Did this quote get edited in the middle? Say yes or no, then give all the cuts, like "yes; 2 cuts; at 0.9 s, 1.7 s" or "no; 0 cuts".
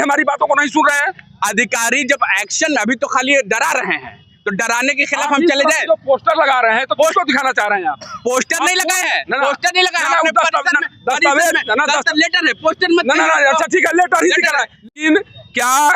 no; 0 cuts